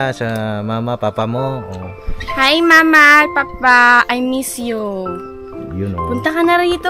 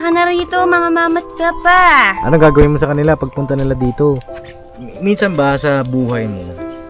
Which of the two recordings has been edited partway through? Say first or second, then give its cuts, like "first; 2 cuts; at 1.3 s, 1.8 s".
second; 1 cut; at 4.3 s